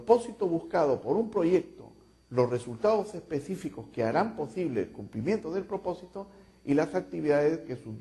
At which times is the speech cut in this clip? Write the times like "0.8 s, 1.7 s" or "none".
none